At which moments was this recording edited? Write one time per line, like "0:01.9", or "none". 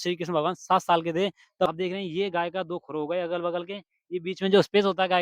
0:01.7

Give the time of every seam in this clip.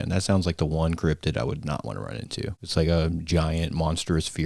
0:02.6

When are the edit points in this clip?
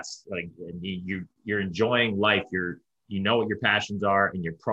none

